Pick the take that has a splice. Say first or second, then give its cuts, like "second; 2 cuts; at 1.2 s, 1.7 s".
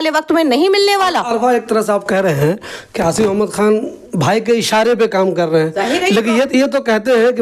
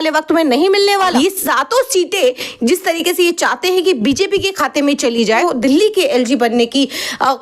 second; 2 cuts; at 1.1 s, 5.4 s